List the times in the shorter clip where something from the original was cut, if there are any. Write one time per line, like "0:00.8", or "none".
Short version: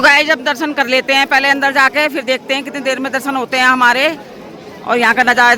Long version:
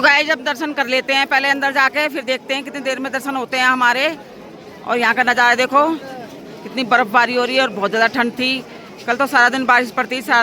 none